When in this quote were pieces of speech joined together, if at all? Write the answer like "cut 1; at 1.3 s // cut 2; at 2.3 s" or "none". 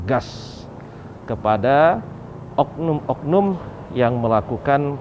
none